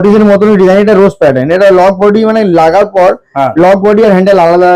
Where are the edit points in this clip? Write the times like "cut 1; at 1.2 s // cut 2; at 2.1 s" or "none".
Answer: none